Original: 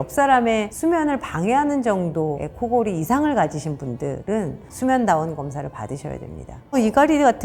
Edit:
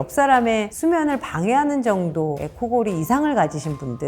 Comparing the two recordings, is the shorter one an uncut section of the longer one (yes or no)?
yes